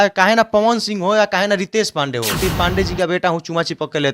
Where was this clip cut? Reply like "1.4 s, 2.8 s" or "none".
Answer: 2.4 s